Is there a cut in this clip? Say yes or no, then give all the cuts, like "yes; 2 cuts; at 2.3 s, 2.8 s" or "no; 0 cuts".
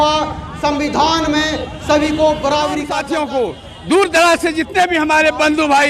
yes; 1 cut; at 2.9 s